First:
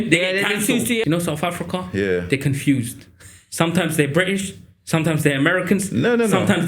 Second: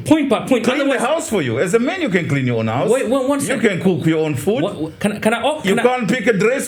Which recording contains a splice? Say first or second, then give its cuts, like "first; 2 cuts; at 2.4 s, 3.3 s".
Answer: first; 1 cut; at 1.0 s